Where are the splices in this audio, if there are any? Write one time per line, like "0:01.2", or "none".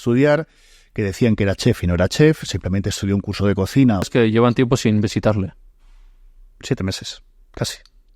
0:04.1